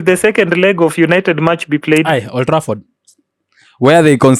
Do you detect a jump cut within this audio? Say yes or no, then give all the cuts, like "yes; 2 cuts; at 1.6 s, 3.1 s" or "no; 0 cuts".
no; 0 cuts